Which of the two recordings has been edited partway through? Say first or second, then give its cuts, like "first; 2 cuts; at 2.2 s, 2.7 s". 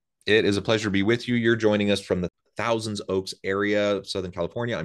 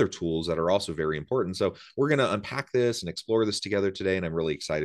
first; 1 cut; at 2.3 s